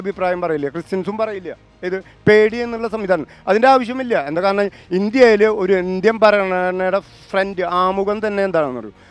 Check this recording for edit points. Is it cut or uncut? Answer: uncut